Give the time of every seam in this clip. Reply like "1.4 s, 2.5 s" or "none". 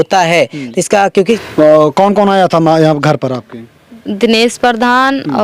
1.4 s